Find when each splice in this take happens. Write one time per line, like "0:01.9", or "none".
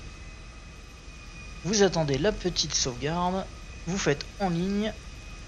0:02.4